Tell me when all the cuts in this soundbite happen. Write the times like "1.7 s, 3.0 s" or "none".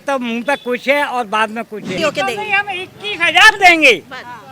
1.9 s